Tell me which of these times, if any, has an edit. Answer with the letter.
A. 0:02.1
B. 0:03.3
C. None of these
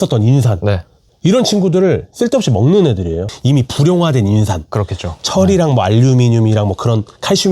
B